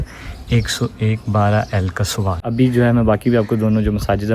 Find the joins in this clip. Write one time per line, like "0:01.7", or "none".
0:02.5